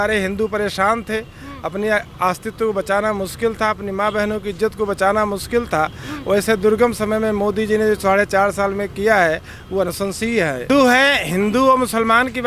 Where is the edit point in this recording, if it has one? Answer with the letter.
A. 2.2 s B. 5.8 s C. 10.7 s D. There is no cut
C